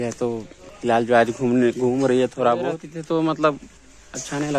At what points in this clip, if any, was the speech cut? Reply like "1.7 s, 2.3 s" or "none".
2.9 s